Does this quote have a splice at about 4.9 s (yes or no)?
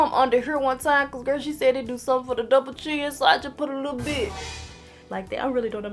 yes